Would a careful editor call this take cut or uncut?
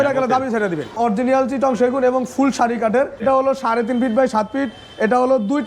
cut